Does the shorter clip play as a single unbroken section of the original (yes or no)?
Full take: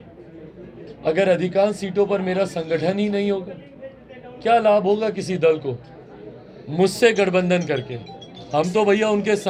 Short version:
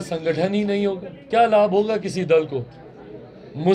no